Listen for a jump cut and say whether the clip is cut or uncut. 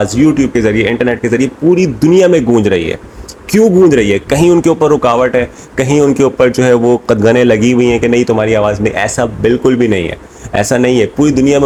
uncut